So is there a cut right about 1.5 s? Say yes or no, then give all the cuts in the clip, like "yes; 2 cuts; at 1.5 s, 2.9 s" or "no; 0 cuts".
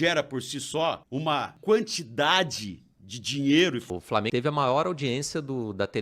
yes; 2 cuts; at 1.5 s, 4.0 s